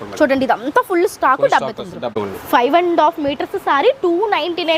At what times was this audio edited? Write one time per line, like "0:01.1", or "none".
0:02.0